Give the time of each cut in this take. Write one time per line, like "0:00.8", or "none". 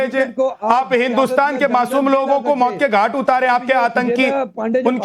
0:01.9